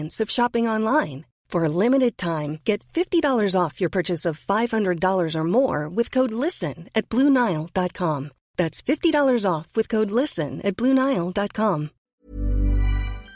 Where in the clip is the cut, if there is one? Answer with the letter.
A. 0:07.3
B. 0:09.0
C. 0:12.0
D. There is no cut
C